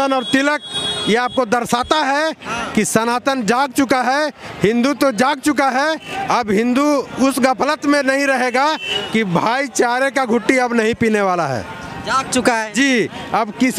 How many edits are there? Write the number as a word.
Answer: zero